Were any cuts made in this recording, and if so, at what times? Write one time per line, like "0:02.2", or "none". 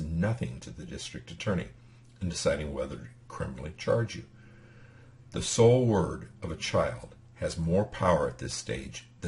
0:07.9